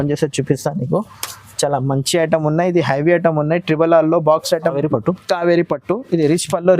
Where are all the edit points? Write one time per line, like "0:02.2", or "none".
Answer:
0:04.7

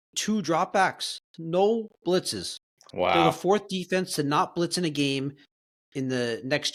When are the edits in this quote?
none

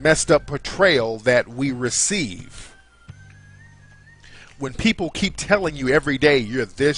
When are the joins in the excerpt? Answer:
0:02.0

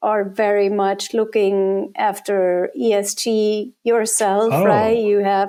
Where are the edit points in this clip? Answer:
none

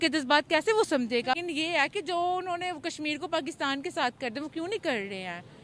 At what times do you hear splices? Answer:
0:01.4

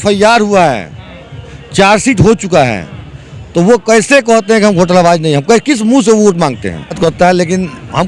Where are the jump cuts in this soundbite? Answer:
0:07.0

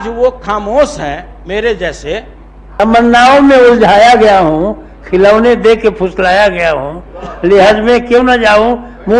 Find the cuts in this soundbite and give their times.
0:02.6

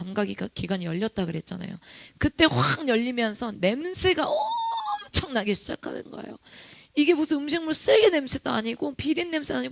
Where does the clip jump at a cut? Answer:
none

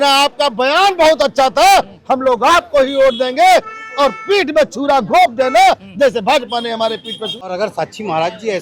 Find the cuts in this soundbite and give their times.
0:07.5

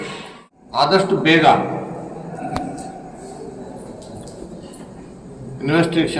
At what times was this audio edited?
0:00.9

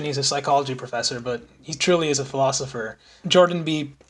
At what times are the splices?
0:03.2

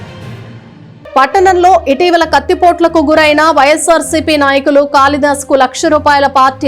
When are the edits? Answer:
0:00.9

